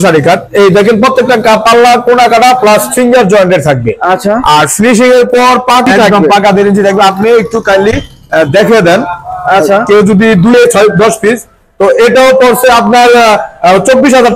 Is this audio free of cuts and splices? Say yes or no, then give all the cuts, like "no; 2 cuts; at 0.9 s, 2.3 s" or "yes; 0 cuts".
no; 2 cuts; at 5.8 s, 10.5 s